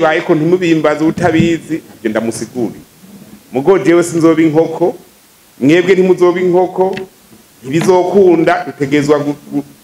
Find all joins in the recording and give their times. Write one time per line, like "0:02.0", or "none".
none